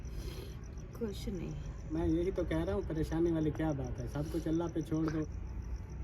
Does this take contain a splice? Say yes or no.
yes